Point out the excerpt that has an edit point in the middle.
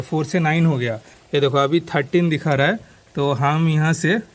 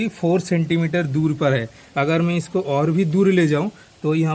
first; 1 cut; at 1.1 s

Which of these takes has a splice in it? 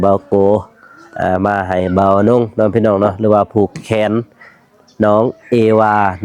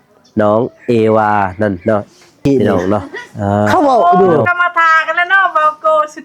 second; 1 cut; at 3.7 s

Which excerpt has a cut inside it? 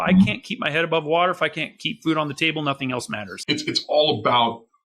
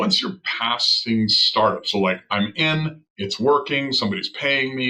first; 1 cut; at 3.3 s

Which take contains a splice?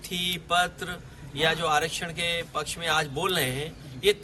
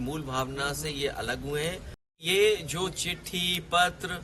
second; 1 cut; at 2.2 s

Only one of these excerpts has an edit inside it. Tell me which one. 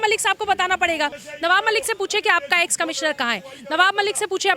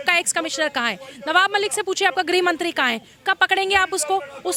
first; 1 cut; at 1.2 s

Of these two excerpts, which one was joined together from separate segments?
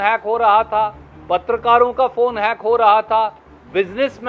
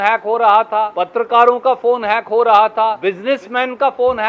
second; 2 cuts; at 1.0 s, 3.0 s

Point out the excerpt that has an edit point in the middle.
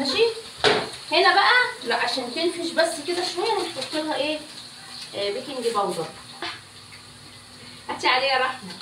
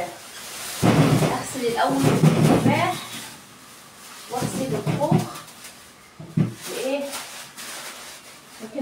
first; 1 cut; at 6.4 s

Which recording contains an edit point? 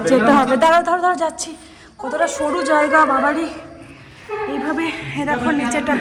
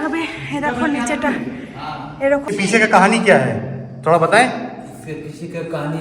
second; 1 cut; at 2.5 s

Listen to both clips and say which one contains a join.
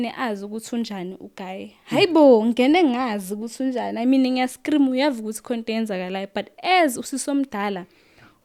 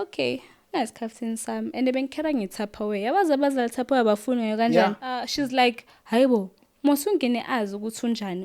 second; 1 cut; at 5.3 s

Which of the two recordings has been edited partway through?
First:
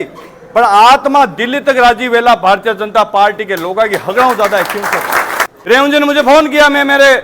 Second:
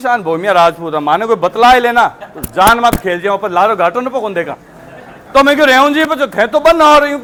first; 1 cut; at 5.5 s

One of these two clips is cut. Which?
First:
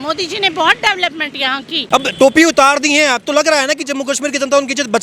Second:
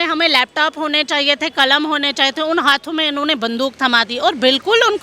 first; 1 cut; at 1.8 s

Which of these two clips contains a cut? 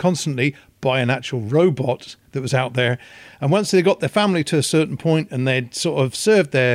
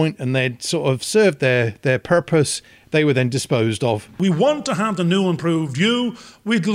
second; 1 cut; at 4.1 s

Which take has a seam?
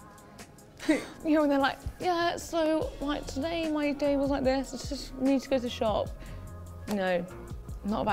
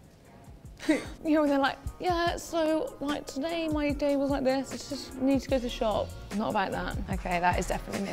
second; 1 cut; at 6.2 s

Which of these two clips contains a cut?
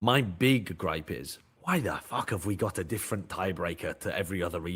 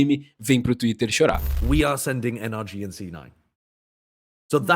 second; 1 cut; at 1.5 s

